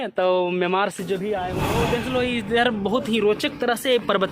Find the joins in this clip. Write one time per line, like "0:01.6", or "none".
0:01.8